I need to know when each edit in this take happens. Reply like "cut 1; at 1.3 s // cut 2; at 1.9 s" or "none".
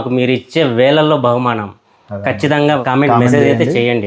cut 1; at 2.8 s